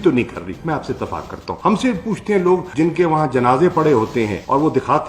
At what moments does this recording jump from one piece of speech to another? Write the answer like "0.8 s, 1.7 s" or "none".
1.5 s